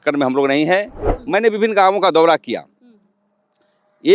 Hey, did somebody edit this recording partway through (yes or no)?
yes